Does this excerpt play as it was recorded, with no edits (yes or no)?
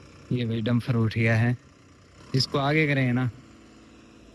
yes